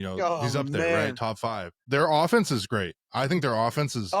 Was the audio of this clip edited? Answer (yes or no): yes